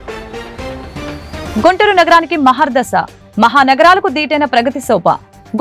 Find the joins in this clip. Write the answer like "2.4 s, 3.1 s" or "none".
1.5 s